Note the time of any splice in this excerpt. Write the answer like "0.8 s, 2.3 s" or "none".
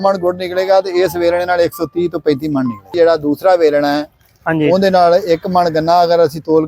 2.9 s